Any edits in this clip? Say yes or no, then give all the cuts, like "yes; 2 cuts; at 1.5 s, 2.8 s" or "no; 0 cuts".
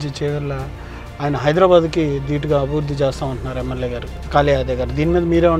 yes; 1 cut; at 4.1 s